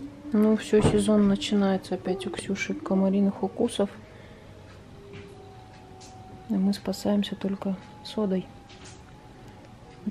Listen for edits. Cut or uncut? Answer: uncut